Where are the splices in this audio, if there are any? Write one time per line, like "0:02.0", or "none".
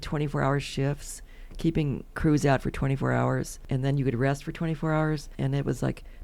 0:03.6
0:05.3